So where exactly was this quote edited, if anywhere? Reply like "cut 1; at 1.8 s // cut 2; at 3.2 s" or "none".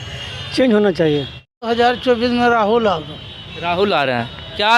cut 1; at 1.5 s